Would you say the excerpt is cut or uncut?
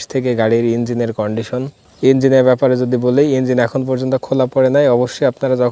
cut